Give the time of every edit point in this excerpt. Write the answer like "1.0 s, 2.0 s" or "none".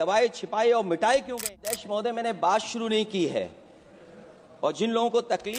1.8 s